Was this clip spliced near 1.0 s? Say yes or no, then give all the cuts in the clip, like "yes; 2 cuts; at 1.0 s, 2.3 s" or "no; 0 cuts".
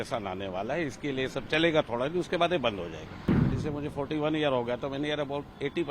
no; 1 cut; at 3.5 s